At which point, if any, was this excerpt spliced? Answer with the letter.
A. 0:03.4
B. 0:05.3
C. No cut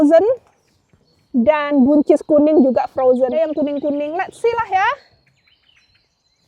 A